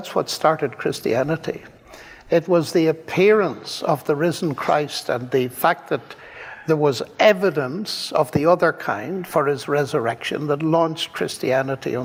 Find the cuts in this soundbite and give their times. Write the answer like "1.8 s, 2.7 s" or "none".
none